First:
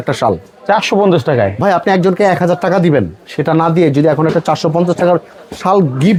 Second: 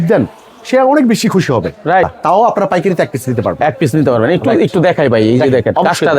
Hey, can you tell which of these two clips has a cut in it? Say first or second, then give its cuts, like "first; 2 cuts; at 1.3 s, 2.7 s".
second; 1 cut; at 2.0 s